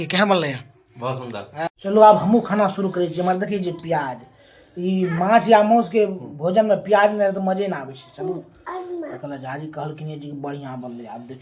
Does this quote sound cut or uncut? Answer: cut